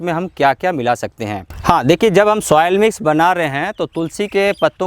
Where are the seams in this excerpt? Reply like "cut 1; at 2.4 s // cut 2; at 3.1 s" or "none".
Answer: cut 1; at 1.5 s